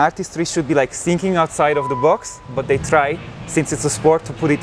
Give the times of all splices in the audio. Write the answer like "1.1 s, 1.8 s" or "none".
none

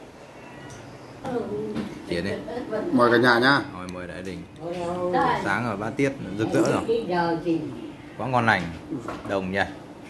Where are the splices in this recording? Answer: 1.2 s

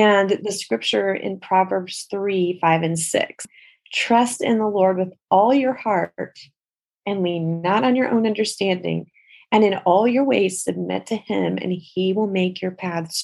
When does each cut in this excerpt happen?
3.4 s

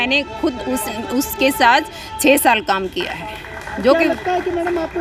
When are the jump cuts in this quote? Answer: none

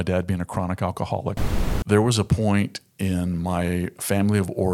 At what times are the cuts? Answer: 1.5 s

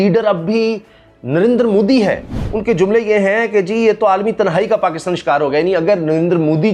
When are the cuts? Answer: none

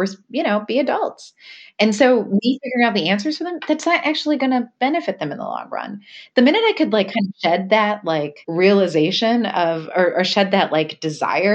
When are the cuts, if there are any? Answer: 8.4 s

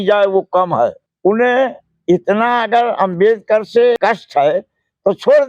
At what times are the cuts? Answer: 1.1 s, 4.0 s

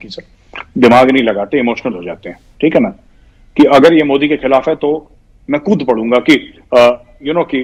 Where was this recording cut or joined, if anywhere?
none

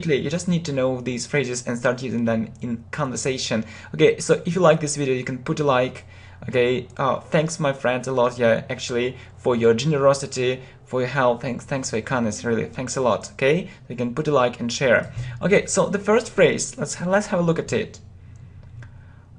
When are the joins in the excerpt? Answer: 14.1 s

